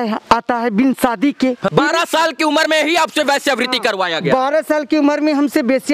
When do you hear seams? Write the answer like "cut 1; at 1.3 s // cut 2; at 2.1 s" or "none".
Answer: cut 1; at 1.7 s